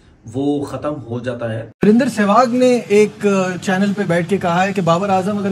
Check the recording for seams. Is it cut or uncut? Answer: cut